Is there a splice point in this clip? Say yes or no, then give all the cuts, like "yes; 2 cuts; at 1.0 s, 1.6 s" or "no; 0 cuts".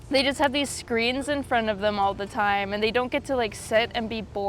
no; 0 cuts